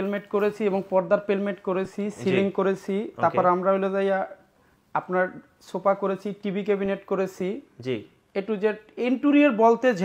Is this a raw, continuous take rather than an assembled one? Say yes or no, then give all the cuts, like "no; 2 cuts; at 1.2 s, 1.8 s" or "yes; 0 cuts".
yes; 0 cuts